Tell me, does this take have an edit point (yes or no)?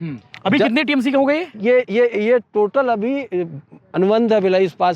no